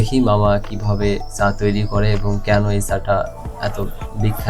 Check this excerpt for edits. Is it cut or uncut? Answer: uncut